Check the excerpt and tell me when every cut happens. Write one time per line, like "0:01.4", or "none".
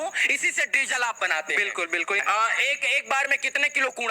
0:02.2